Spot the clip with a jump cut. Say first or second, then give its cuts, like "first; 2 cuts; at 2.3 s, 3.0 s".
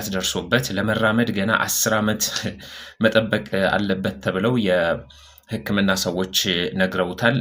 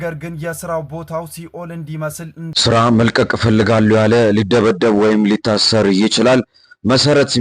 second; 1 cut; at 2.4 s